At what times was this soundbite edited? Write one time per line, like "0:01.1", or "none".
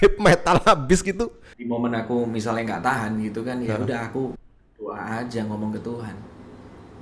0:01.5